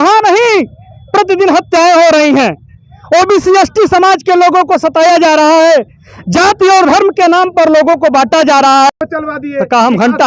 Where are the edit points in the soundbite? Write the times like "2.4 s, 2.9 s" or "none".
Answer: 8.9 s